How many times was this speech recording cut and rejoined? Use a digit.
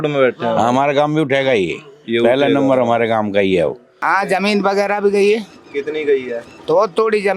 1